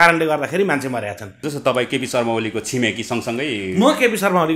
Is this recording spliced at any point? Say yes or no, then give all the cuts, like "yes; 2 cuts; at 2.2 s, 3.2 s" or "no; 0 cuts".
yes; 1 cut; at 1.4 s